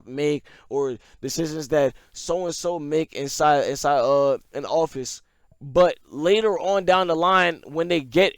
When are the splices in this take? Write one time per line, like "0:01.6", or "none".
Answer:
none